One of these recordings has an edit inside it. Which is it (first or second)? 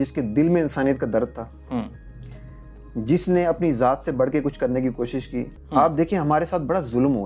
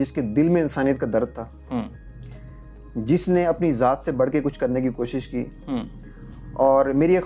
first